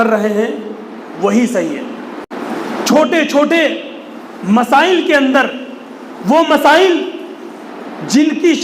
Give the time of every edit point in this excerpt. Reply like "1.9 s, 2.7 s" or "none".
2.2 s